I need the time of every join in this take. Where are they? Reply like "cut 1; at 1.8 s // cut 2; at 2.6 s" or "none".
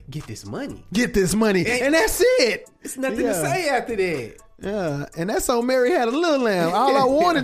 cut 1; at 2.7 s